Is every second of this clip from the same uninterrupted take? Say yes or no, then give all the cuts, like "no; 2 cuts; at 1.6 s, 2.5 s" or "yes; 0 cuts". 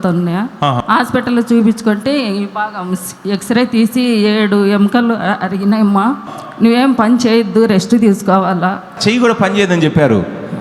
no; 3 cuts; at 0.8 s, 6.2 s, 8.9 s